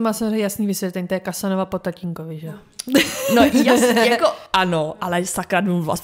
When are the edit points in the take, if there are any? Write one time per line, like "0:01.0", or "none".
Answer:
none